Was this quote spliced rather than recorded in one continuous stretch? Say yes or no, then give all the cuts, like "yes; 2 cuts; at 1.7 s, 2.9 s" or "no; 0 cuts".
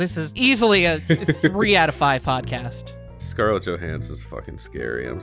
yes; 1 cut; at 2.9 s